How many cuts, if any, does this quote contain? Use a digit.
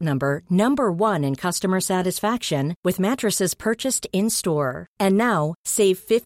0